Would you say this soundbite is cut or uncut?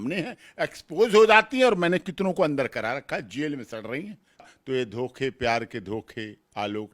cut